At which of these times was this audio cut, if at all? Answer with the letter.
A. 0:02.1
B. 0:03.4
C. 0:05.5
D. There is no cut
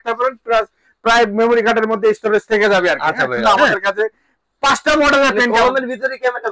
B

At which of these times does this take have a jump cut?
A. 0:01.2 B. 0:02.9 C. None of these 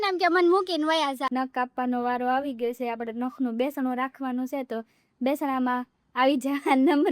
A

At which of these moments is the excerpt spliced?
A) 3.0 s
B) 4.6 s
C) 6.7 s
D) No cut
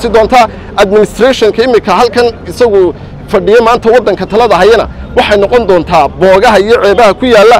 D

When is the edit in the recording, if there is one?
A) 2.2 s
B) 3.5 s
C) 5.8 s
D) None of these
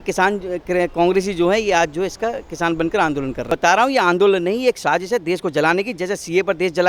B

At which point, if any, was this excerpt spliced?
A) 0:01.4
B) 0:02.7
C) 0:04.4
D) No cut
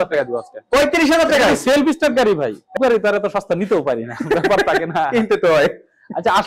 B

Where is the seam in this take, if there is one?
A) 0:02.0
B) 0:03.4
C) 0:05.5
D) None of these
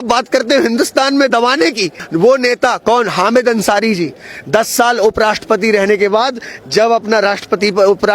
A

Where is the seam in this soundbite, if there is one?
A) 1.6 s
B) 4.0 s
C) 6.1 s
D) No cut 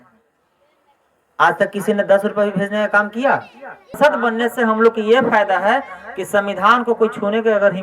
B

